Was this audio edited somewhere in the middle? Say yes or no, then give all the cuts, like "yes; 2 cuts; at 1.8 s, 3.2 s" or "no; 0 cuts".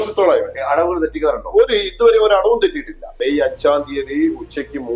yes; 1 cut; at 3.1 s